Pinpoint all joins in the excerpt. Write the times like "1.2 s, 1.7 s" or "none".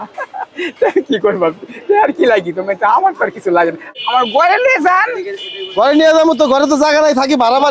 3.9 s